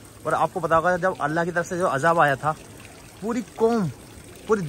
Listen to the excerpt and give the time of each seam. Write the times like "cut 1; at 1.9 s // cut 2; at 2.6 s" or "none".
none